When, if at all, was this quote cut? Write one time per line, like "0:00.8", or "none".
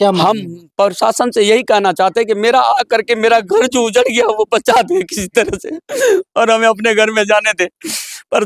none